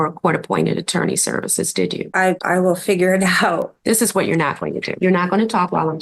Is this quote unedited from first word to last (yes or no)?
no